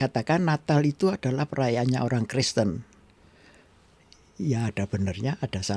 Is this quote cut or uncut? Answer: uncut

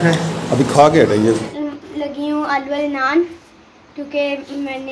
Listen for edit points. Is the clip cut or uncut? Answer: cut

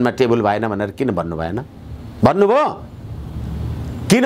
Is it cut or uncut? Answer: uncut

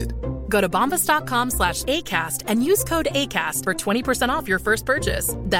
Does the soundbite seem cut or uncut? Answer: uncut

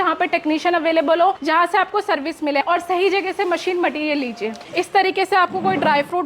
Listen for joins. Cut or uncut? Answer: cut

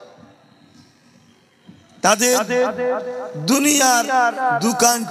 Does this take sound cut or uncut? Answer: uncut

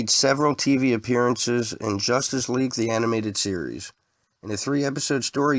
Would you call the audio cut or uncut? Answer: uncut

